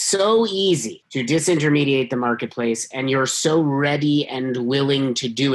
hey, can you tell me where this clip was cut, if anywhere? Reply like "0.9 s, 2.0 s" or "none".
1.0 s